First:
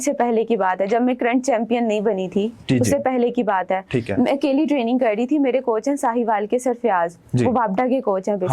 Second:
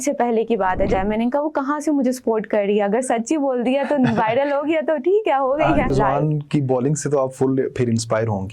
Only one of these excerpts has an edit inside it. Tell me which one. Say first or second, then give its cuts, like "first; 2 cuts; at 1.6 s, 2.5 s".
second; 2 cuts; at 0.9 s, 5.9 s